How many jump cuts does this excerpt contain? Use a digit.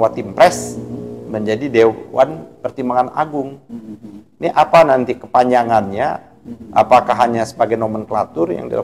0